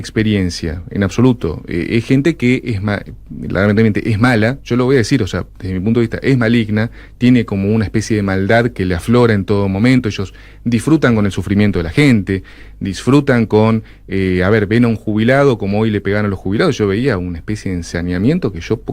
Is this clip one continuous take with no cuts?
yes; 0 cuts

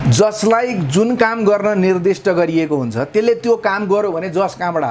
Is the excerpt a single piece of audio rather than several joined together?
yes; 0 cuts

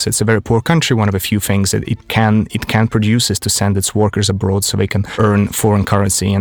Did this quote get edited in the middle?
yes; 1 cut; at 5.0 s

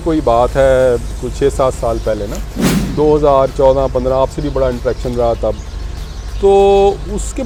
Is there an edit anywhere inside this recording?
no; 0 cuts

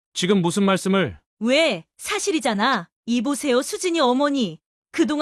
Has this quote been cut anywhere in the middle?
yes; 1 cut; at 1.2 s

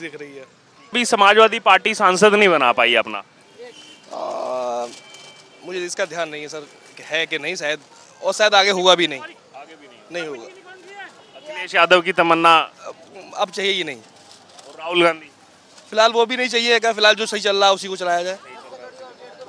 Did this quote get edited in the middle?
yes; 1 cut; at 0.9 s

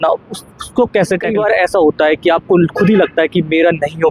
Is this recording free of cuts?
no; 1 cut; at 1.3 s

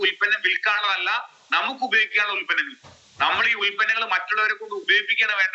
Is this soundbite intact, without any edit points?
yes; 0 cuts

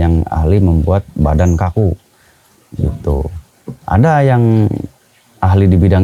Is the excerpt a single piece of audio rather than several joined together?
yes; 0 cuts

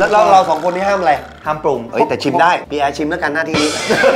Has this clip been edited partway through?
yes; 1 cut; at 1.8 s

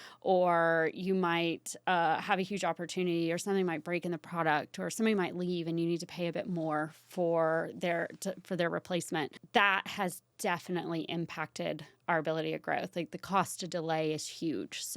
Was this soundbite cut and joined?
yes; 1 cut; at 9.4 s

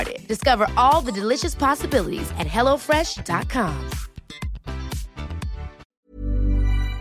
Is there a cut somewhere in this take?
yes; 1 cut; at 5.9 s

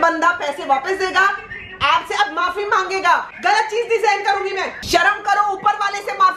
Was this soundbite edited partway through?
yes; 2 cuts; at 3.3 s, 4.8 s

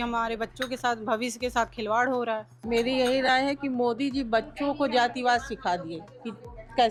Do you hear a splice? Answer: no; 0 cuts

